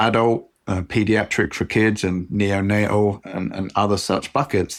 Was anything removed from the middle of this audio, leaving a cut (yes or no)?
no